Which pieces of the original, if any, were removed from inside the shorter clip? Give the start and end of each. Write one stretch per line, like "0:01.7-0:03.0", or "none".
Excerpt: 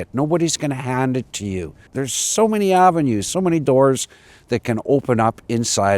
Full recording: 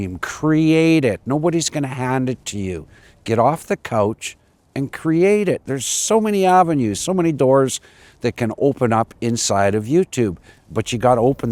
0:03.1-0:05.7